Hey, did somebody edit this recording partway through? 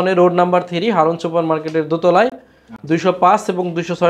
no; 0 cuts

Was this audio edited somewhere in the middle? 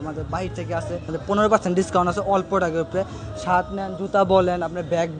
yes; 1 cut; at 1.1 s

